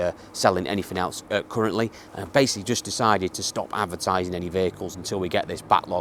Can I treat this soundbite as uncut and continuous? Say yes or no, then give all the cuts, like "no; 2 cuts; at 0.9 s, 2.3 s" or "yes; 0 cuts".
yes; 0 cuts